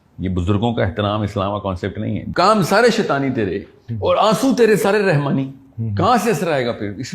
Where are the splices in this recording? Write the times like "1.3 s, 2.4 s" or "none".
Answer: 2.2 s